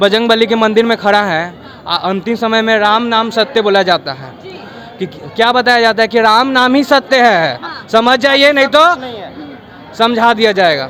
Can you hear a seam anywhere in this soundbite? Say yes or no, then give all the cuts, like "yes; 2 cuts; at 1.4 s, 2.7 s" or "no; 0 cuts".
no; 0 cuts